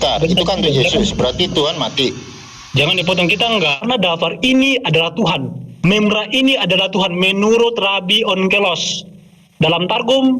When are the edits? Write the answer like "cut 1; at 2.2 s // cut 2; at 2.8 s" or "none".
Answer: cut 1; at 3.8 s